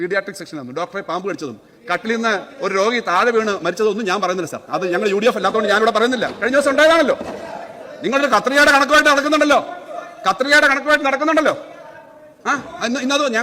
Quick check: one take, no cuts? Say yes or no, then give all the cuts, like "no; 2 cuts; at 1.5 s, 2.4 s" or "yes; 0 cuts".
yes; 0 cuts